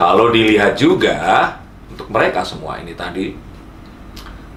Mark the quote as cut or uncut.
uncut